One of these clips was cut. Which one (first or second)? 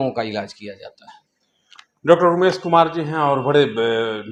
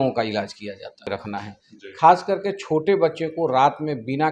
second